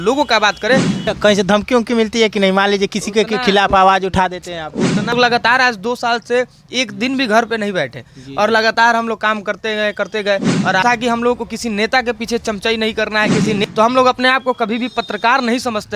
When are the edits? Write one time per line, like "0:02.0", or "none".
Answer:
0:00.9
0:05.1
0:10.8
0:13.6

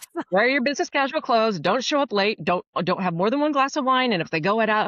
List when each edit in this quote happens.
none

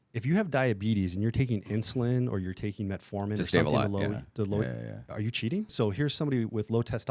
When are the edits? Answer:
0:05.7

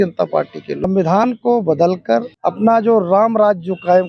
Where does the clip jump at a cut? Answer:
0:00.8
0:02.4

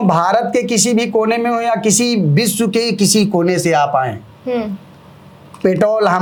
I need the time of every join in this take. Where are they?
none

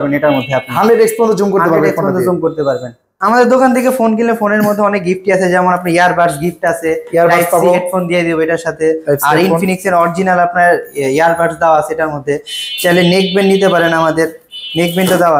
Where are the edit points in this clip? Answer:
0:03.1

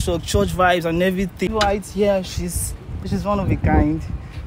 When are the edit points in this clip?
0:01.5
0:03.1

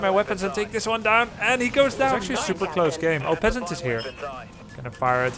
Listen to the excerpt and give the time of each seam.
0:02.3

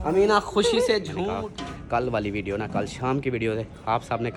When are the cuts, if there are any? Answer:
0:01.2

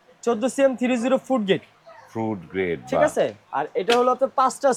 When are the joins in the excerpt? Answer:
none

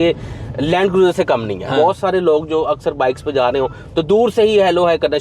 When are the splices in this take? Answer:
0:01.6

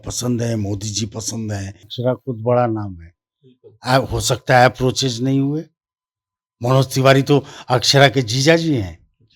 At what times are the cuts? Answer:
0:01.9

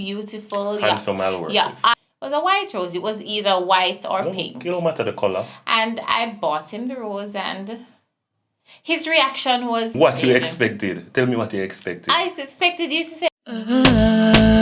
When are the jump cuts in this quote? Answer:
0:01.9
0:09.9
0:13.3

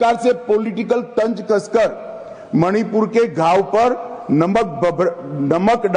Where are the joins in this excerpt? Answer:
none

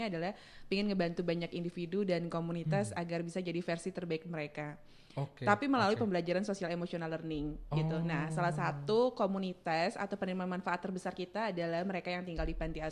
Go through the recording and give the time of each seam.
none

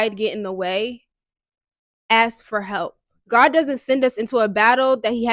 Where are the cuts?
0:03.1

